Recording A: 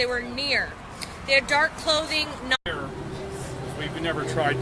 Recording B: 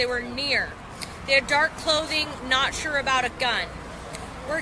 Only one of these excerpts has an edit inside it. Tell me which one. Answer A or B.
B